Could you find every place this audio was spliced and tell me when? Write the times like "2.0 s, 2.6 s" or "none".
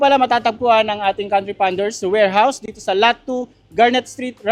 none